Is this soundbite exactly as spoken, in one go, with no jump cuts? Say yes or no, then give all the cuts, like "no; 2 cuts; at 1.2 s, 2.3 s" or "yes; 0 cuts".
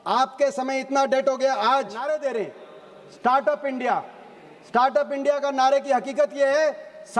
no; 1 cut; at 2.2 s